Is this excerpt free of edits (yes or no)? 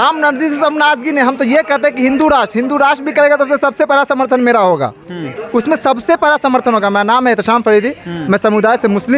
yes